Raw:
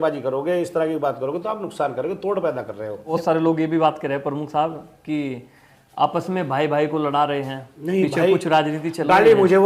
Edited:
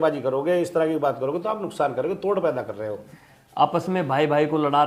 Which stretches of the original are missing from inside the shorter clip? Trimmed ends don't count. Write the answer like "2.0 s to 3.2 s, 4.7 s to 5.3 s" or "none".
3.0 s to 5.4 s

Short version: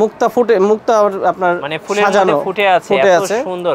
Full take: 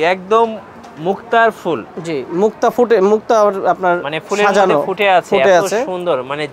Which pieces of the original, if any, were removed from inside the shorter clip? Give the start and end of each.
none

